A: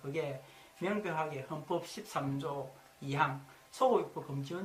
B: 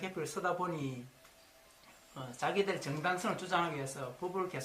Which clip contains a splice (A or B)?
B